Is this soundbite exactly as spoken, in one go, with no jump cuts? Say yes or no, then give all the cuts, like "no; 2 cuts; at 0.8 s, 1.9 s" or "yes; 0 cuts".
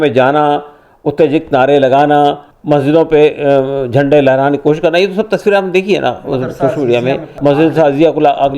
no; 2 cuts; at 2.5 s, 7.3 s